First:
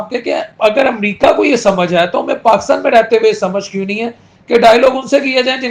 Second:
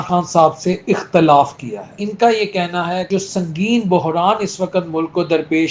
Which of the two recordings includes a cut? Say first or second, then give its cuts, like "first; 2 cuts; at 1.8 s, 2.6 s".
second; 2 cuts; at 2.0 s, 3.1 s